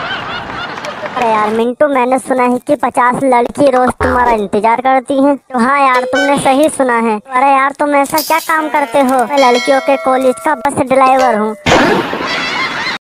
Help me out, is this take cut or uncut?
cut